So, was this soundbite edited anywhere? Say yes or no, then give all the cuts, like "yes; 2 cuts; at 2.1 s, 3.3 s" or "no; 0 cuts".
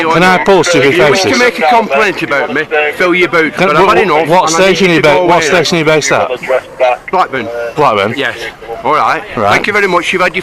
no; 0 cuts